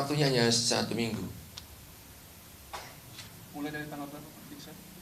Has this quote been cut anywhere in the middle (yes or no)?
no